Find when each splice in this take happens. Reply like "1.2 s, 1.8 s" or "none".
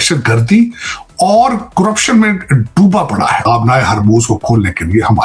3.4 s